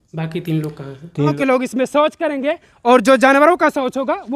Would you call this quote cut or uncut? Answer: cut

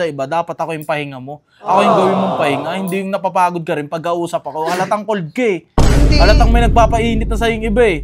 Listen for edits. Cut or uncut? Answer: uncut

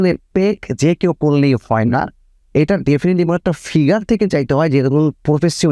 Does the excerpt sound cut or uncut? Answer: uncut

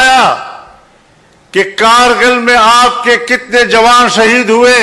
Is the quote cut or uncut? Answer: uncut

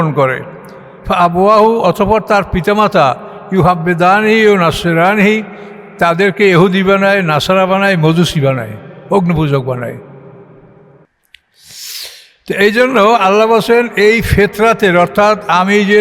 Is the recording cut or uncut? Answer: cut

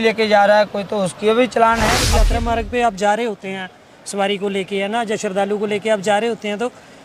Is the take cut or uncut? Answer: cut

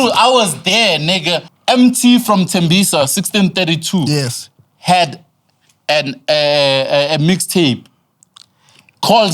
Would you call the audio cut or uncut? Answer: cut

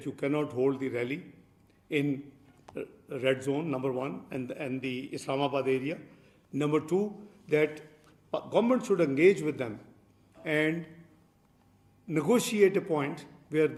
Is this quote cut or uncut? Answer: uncut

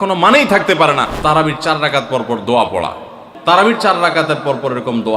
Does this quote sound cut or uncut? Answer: cut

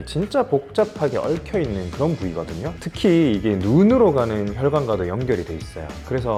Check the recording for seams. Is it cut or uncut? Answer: uncut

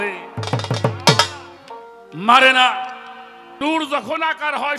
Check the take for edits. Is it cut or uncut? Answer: cut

